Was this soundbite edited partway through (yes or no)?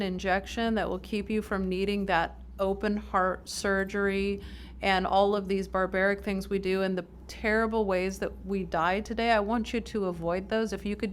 no